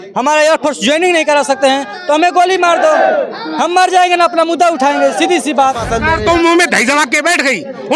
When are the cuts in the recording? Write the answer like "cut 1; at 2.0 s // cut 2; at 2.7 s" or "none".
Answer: cut 1; at 5.9 s